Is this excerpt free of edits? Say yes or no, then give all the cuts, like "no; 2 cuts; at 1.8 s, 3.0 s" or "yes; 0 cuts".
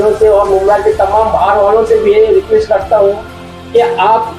yes; 0 cuts